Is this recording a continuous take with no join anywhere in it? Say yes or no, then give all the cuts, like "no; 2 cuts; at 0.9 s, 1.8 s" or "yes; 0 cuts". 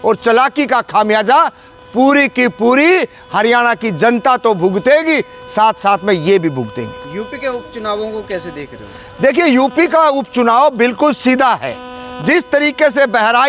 yes; 0 cuts